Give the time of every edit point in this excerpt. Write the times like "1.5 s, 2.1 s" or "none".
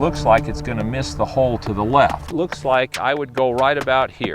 2.2 s